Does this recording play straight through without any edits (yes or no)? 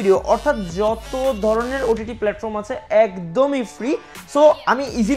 yes